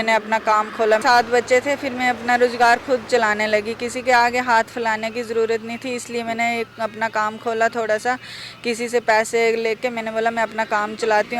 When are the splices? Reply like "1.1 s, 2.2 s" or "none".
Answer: 1.0 s